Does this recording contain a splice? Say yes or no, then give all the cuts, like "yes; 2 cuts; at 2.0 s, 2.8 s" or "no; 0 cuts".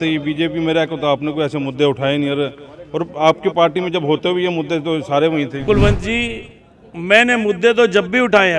yes; 1 cut; at 5.6 s